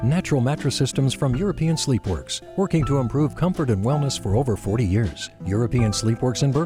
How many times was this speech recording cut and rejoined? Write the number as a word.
zero